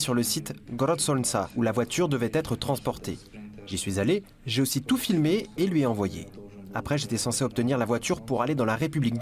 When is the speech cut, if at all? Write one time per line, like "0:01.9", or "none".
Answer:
none